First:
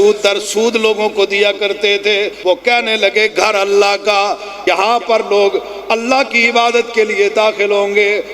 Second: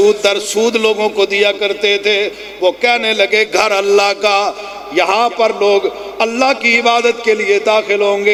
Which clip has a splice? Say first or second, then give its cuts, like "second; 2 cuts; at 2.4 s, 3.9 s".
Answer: first; 2 cuts; at 2.3 s, 4.5 s